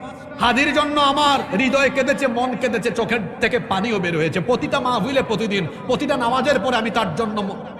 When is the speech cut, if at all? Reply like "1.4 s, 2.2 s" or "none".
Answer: none